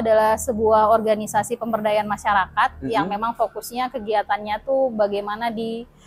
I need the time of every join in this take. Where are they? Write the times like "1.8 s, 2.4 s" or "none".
none